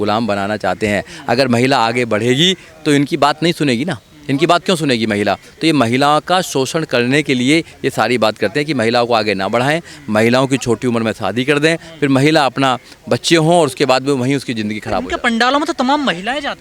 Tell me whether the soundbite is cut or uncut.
uncut